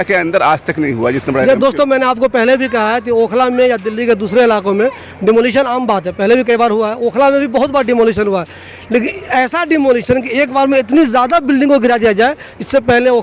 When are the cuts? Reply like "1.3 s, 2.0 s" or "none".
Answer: none